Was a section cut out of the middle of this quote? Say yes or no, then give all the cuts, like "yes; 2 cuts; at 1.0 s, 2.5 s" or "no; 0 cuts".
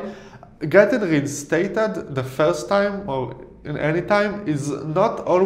no; 0 cuts